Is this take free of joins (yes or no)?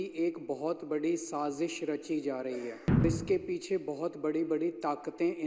no